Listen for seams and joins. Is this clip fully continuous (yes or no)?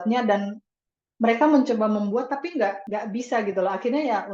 no